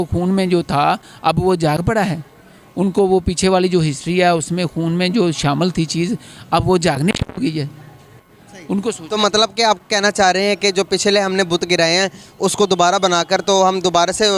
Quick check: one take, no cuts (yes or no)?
yes